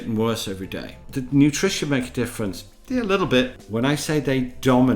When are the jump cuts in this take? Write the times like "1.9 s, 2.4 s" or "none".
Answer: 1.0 s, 3.6 s